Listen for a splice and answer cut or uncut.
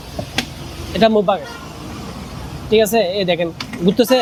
uncut